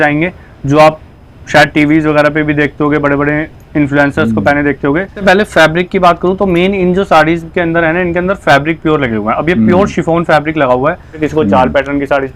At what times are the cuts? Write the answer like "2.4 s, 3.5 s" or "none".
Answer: 5.2 s, 11.2 s